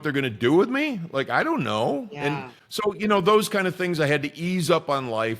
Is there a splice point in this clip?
yes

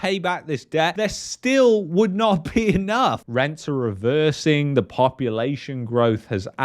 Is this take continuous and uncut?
no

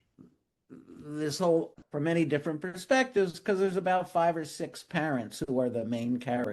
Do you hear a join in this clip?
yes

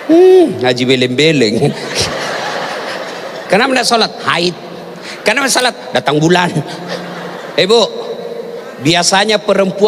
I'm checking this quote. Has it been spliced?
yes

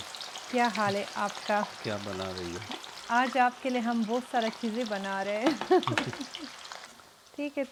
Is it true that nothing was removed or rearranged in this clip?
yes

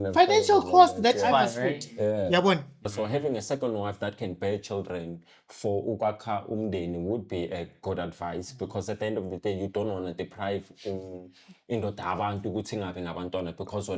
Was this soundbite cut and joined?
yes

